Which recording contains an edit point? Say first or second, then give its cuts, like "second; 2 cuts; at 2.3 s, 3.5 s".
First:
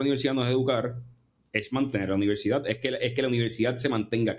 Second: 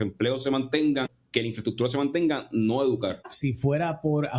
second; 2 cuts; at 1.0 s, 3.2 s